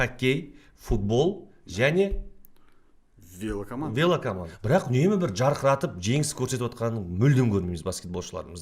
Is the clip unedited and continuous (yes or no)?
no